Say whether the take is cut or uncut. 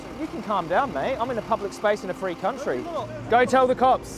cut